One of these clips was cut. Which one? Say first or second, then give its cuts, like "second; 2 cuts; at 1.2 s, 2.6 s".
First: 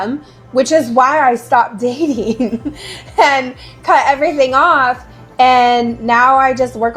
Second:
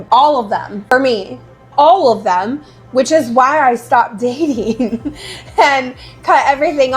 second; 1 cut; at 0.9 s